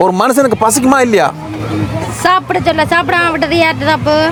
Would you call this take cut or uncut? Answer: uncut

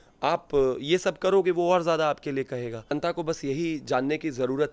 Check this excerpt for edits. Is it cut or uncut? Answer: cut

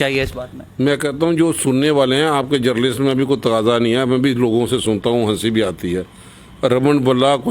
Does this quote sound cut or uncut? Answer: uncut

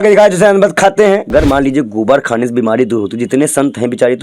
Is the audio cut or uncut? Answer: cut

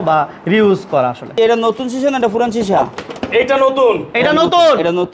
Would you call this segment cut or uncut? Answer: cut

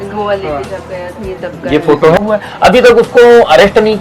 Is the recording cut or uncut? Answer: cut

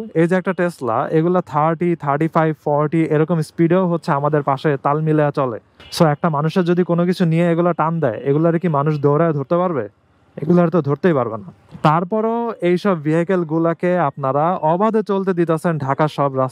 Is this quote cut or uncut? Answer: uncut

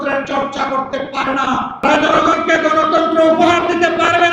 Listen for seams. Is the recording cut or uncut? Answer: cut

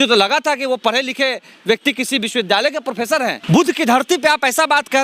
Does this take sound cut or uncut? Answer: cut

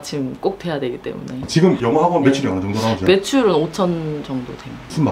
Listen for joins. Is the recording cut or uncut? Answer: cut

